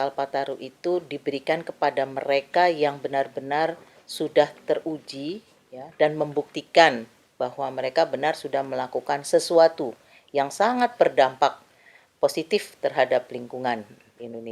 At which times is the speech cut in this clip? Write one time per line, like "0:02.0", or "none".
none